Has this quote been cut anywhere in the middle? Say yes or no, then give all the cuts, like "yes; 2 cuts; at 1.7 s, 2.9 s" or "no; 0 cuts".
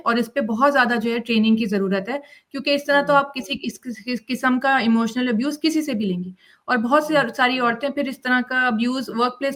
no; 0 cuts